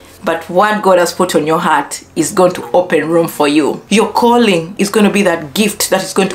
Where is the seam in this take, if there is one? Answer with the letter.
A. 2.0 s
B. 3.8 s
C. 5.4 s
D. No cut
B